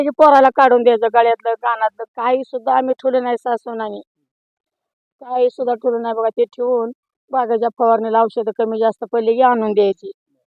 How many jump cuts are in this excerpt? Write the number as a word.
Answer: zero